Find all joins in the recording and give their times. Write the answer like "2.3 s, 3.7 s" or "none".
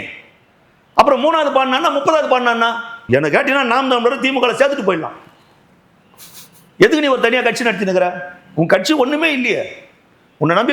3.0 s

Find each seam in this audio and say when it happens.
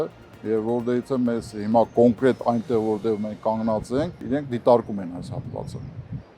4.2 s

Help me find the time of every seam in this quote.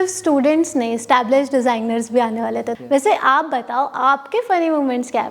2.7 s

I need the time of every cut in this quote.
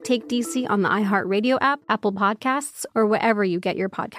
1.8 s

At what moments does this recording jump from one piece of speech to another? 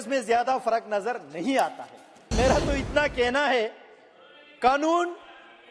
2.3 s

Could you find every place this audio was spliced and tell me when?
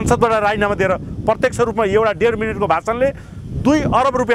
none

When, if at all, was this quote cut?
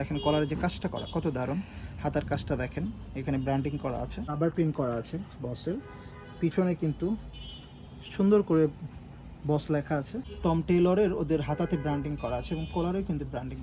4.3 s, 10.3 s

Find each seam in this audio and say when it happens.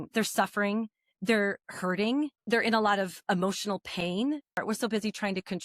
2.4 s, 4.6 s

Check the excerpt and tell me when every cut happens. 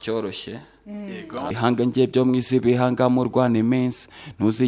1.5 s

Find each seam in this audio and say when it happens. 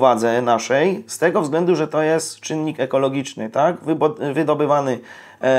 none

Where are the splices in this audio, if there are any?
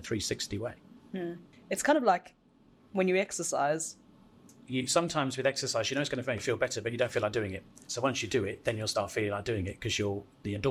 none

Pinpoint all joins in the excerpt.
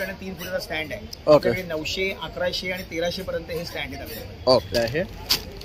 4.7 s

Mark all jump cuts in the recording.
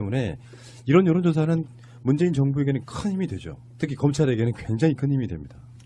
none

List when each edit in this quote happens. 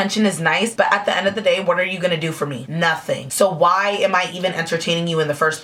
none

